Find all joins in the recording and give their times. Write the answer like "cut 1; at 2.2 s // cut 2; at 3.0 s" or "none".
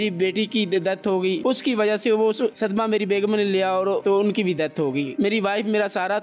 cut 1; at 1.4 s // cut 2; at 4.0 s // cut 3; at 5.1 s